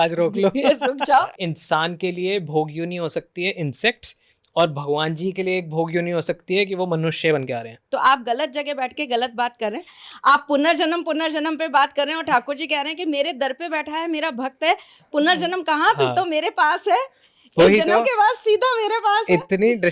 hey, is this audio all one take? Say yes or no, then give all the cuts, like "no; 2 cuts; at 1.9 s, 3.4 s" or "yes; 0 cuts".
no; 2 cuts; at 1.3 s, 7.8 s